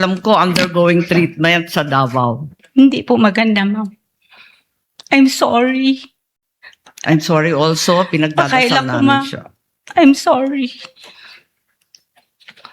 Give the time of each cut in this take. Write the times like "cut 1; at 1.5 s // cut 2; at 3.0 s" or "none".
cut 1; at 2.5 s

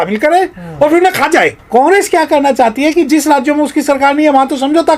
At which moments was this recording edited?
cut 1; at 1.6 s

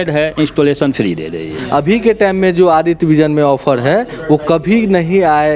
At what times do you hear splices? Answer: cut 1; at 1.5 s

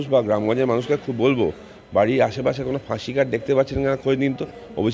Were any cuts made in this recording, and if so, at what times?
none

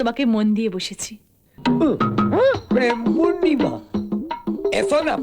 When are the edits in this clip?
cut 1; at 1.5 s

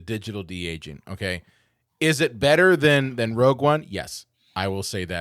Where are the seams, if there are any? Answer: none

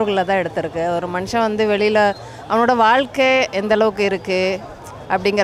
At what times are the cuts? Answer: none

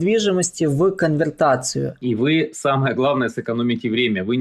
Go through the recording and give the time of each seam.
cut 1; at 1.9 s

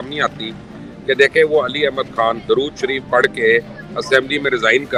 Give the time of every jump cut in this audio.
none

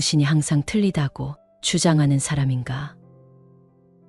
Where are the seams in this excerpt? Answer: cut 1; at 3.0 s

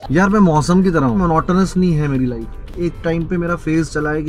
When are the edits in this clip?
cut 1; at 1.2 s // cut 2; at 2.7 s

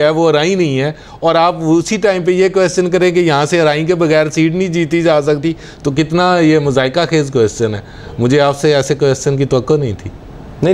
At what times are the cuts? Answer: none

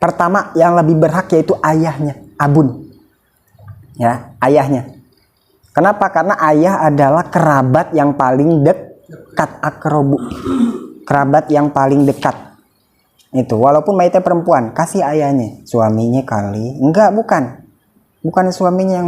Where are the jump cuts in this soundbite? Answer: none

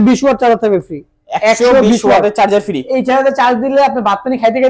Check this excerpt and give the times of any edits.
none

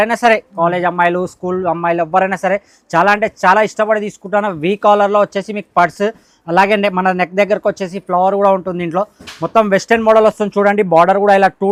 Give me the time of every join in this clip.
none

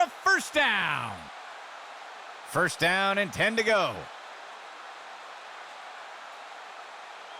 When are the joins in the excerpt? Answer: none

